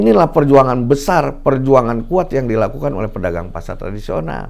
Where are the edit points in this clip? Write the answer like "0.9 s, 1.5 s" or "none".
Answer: none